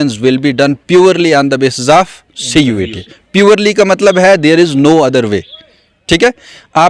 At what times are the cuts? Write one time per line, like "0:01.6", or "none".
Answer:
none